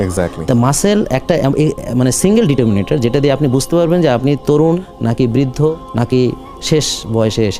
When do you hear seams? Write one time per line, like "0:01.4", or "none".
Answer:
0:04.9
0:05.8